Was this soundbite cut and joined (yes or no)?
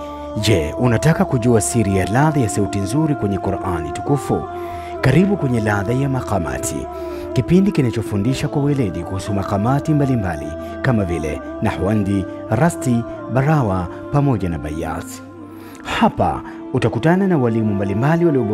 no